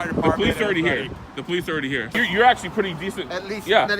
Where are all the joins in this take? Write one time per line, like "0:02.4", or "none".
0:02.2